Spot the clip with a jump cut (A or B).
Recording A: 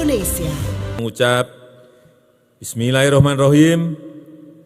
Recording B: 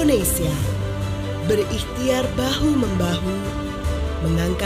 A